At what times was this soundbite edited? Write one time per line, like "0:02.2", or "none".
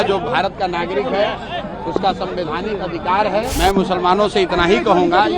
0:03.5